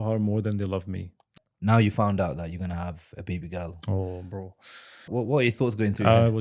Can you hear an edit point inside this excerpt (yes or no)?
yes